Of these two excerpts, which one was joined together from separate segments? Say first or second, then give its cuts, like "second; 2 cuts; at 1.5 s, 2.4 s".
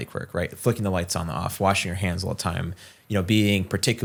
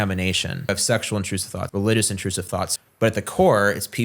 second; 3 cuts; at 0.7 s, 1.6 s, 2.7 s